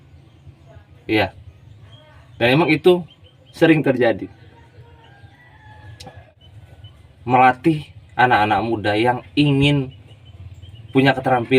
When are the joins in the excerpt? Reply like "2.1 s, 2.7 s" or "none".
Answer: 6.3 s